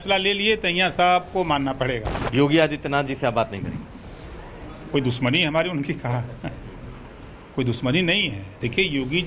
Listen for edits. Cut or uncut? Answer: cut